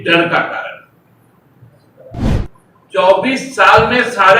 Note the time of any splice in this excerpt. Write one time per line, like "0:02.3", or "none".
0:02.2